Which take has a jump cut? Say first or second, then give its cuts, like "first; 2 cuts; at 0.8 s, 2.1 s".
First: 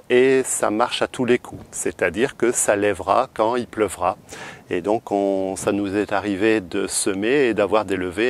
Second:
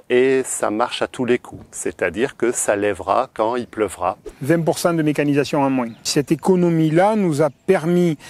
second; 2 cuts; at 4.3 s, 6.1 s